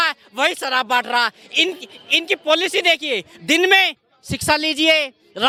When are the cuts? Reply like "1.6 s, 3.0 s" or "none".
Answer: none